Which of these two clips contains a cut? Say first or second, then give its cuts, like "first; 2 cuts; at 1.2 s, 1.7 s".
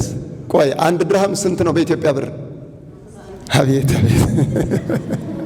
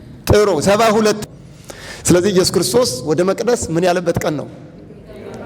second; 1 cut; at 1.2 s